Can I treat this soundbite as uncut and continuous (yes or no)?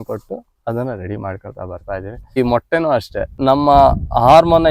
no